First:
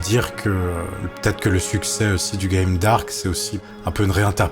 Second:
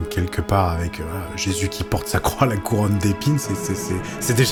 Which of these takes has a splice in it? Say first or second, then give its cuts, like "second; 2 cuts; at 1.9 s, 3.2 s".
first; 2 cuts; at 1.0 s, 3.5 s